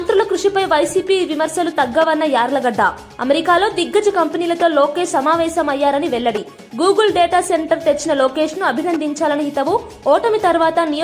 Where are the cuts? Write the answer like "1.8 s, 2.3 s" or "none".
none